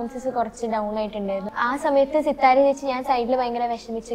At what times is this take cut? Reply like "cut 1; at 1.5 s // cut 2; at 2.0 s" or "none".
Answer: cut 1; at 1.5 s